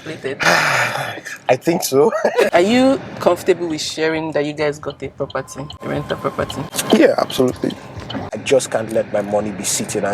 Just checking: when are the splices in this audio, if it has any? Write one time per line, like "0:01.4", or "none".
0:02.5
0:08.3

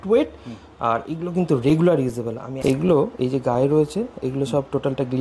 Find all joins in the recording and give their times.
0:02.5

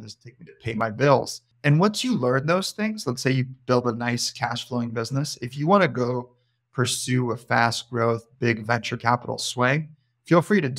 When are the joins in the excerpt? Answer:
0:01.4

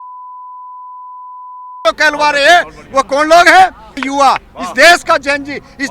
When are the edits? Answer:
0:04.0

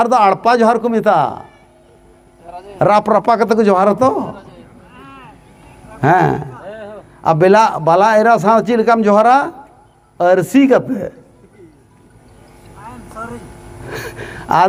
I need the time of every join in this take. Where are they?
none

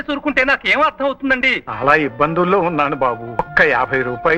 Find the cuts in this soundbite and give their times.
0:01.6
0:03.5

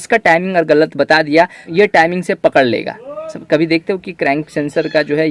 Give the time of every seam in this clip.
0:01.6

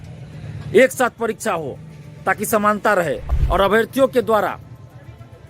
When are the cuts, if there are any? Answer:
0:03.3

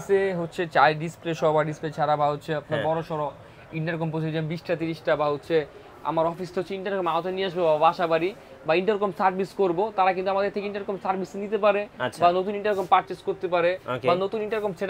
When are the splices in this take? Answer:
none

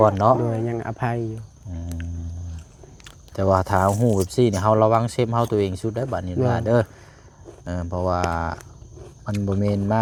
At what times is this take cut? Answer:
none

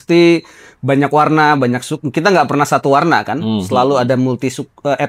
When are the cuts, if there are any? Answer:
none

